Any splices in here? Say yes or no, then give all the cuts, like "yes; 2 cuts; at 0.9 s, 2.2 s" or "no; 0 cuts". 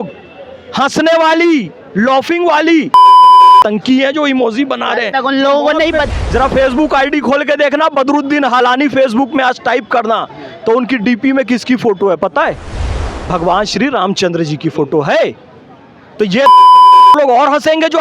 yes; 1 cut; at 6.1 s